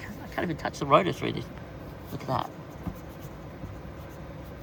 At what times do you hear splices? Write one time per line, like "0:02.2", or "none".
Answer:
none